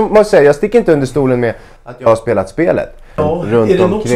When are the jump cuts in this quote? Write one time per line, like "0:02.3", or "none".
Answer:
0:03.2